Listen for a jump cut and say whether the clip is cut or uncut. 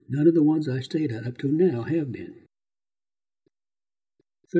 uncut